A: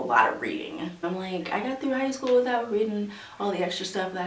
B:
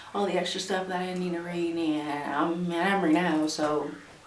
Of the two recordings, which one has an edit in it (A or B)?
A